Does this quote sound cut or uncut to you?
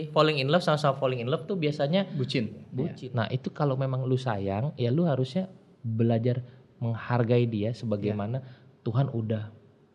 cut